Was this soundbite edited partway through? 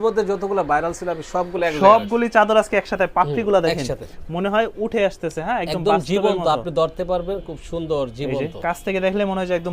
no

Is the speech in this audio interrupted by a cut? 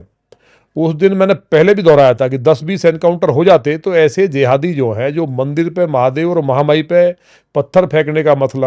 no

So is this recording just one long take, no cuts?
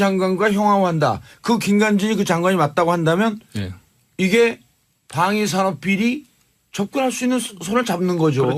yes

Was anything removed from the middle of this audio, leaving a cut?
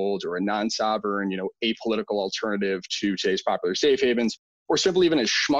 no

